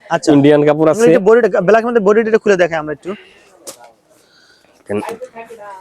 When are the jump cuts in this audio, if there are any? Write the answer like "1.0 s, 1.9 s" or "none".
none